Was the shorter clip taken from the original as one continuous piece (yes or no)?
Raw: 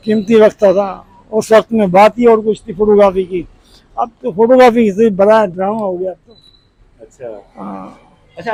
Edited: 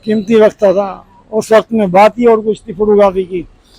yes